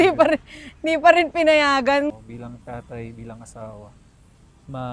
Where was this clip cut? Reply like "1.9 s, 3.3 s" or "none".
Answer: 2.1 s